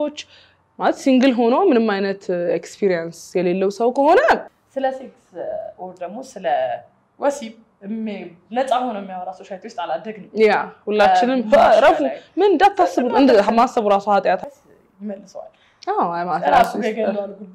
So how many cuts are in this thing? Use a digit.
2